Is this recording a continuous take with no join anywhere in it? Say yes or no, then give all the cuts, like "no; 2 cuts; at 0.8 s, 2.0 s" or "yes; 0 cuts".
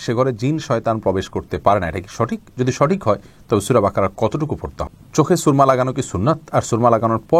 no; 1 cut; at 4.9 s